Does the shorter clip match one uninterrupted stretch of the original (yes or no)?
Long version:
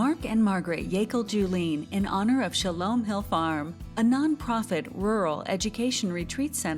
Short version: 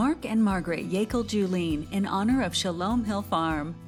yes